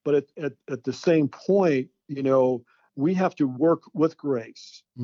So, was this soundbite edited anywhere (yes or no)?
no